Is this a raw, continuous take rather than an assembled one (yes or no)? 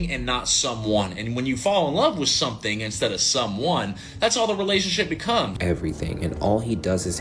no